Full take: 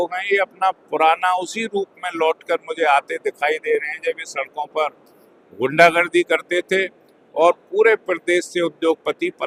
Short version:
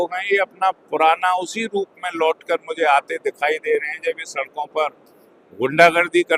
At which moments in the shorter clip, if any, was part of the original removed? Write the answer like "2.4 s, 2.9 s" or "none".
none